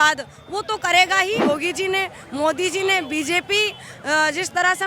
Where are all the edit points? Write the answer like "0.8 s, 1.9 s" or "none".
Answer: 1.4 s